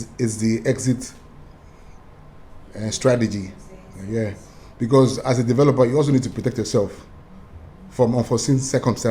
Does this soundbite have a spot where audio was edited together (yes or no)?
no